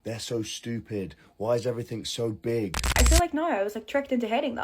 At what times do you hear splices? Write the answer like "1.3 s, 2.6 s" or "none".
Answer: 3.0 s